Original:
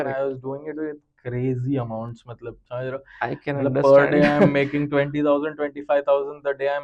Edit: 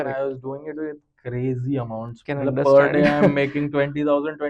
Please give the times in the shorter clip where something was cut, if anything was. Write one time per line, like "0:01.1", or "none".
0:02.2